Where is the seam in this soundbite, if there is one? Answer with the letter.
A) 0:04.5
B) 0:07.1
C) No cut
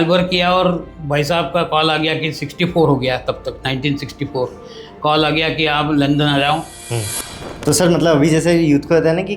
B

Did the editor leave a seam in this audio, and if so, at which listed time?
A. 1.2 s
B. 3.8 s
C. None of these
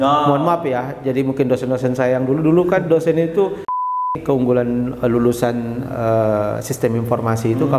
B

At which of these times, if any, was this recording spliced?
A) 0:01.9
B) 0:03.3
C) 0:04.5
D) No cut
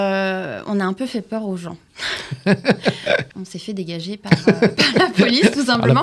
B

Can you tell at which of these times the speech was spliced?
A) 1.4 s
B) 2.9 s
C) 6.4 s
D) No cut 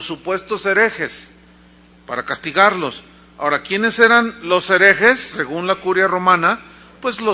C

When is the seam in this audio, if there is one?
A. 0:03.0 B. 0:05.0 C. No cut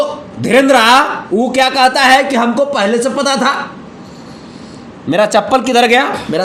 C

